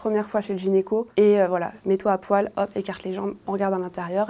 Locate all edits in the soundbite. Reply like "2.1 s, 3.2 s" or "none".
none